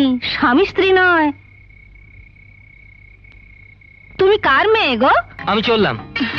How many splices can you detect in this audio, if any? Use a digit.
1